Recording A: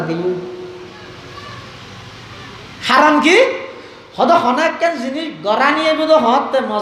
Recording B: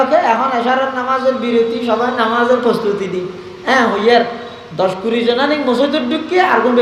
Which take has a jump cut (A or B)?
A